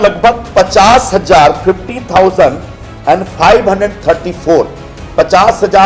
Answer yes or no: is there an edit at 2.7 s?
no